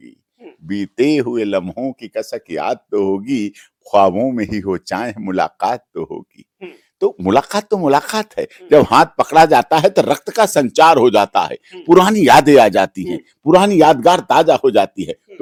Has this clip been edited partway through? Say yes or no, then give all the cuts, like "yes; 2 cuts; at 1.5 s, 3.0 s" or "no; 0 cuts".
no; 0 cuts